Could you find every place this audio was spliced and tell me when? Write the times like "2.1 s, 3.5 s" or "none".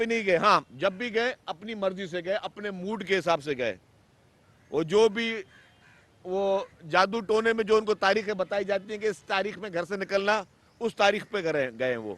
none

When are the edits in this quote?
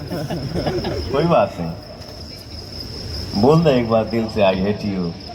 none

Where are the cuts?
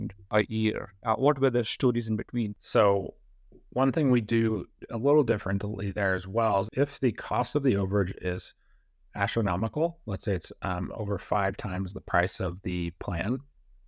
2.6 s, 6.7 s

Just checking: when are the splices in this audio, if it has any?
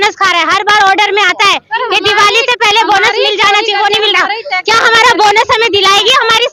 none

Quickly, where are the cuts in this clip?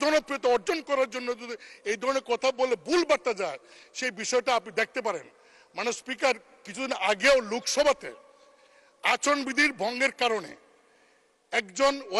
none

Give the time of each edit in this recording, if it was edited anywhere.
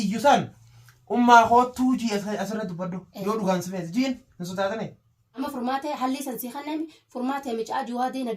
5.4 s

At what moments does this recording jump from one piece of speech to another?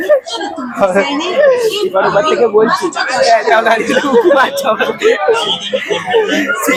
none

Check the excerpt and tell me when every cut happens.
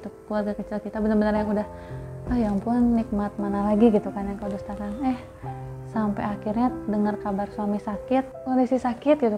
8.3 s

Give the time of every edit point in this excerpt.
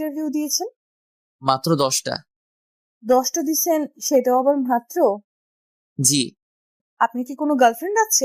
6.8 s

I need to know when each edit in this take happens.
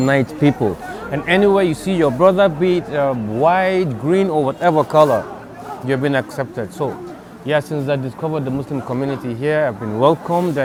none

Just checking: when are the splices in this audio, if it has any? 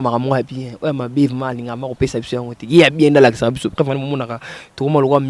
none

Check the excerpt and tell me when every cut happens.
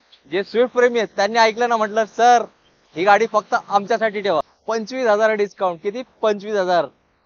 4.5 s

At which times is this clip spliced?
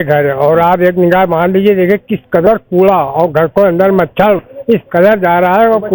none

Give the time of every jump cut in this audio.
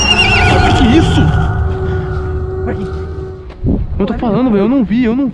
3.4 s

